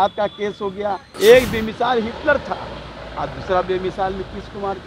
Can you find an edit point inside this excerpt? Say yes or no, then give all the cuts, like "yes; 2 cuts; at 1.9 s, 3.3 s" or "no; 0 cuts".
yes; 1 cut; at 1.0 s